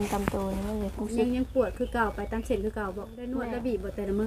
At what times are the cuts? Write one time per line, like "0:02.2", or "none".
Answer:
0:03.1